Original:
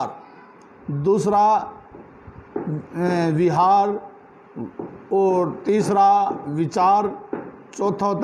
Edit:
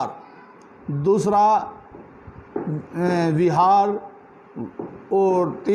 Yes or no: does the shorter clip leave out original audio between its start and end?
no